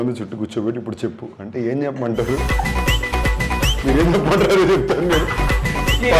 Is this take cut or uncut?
uncut